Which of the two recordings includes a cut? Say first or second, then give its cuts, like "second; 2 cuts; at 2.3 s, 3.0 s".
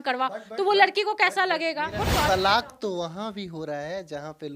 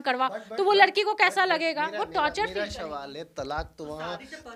first; 1 cut; at 2.3 s